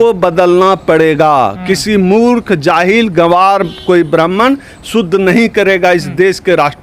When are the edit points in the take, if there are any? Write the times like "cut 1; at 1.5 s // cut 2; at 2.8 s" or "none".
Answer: none